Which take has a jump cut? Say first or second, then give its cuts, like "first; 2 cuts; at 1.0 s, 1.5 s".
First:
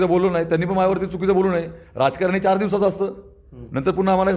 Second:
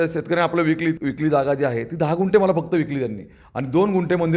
second; 1 cut; at 1.0 s